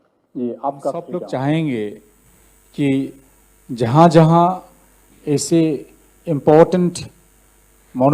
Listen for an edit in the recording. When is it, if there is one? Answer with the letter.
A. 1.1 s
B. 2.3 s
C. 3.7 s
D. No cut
A